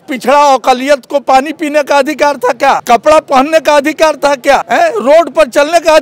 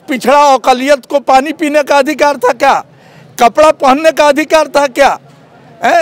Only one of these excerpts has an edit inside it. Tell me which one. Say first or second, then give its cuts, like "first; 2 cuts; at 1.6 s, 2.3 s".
first; 2 cuts; at 2.8 s, 4.7 s